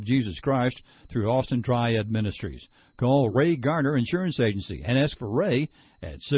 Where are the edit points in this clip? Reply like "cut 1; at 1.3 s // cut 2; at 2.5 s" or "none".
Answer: none